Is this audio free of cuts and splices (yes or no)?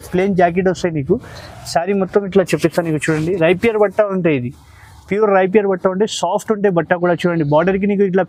yes